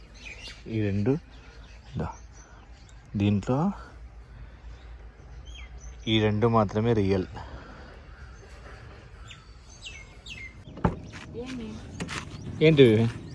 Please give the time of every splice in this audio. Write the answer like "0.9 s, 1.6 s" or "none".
10.4 s